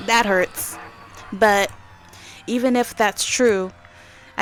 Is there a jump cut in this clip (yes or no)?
no